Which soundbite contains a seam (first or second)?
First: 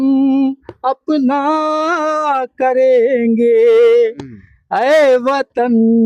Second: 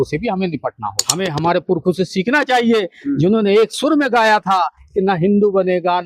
second